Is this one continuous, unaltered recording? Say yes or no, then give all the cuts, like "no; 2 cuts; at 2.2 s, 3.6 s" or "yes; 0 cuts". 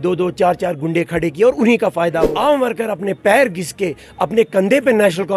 no; 1 cut; at 2.3 s